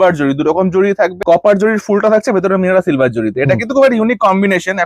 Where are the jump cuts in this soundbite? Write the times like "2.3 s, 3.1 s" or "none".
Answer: 1.2 s